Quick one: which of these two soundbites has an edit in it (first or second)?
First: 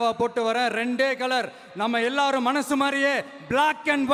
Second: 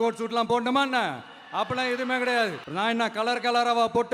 second